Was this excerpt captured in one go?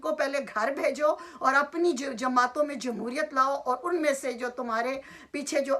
yes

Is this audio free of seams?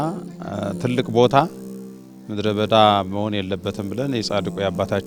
yes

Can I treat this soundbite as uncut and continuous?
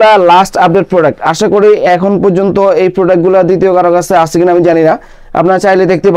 yes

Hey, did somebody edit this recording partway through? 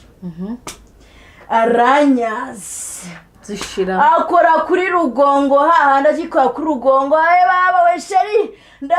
no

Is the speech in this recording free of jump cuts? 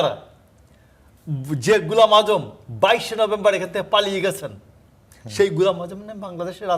yes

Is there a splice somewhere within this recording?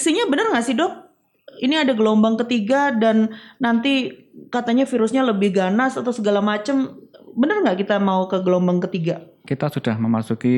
yes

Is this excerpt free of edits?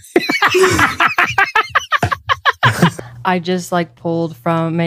no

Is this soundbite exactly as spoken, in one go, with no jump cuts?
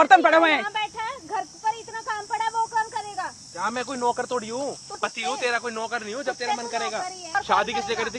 no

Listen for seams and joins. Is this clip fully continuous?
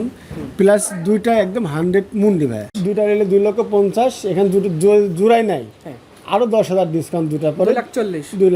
no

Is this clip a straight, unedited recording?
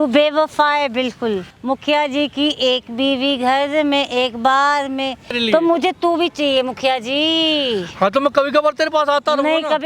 no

